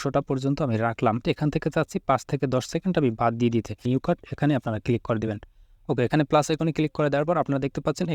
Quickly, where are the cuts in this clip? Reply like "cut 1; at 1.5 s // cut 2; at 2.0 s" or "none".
cut 1; at 1.2 s // cut 2; at 3.9 s